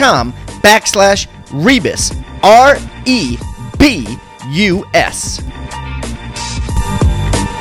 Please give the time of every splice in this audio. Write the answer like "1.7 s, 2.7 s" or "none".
5.2 s